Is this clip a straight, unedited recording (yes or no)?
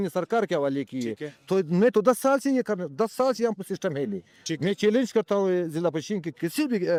yes